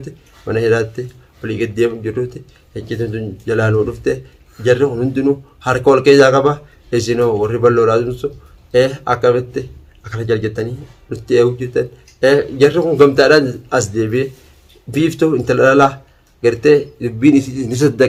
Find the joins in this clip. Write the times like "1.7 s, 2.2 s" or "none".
none